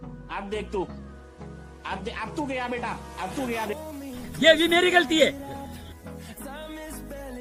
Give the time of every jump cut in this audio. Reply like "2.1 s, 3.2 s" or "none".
none